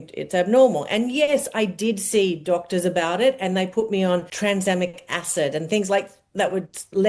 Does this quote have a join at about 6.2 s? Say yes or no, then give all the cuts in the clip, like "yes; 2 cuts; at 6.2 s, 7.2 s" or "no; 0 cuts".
no; 1 cut; at 4.3 s